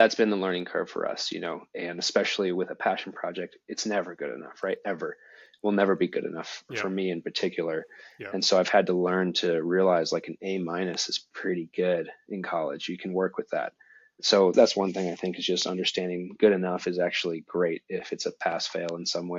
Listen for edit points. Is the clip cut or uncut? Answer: cut